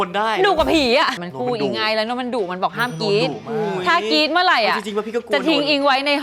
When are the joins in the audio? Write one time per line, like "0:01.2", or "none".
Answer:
0:01.1